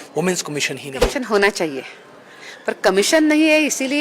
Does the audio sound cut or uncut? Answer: cut